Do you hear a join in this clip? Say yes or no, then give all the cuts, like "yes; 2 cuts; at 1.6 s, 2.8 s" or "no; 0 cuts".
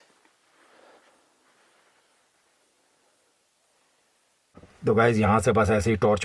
yes; 1 cut; at 4.6 s